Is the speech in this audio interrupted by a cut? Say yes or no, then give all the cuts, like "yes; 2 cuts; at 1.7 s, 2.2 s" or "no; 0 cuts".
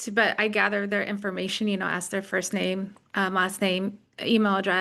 no; 0 cuts